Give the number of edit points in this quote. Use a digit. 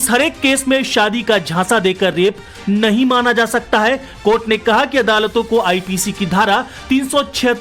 0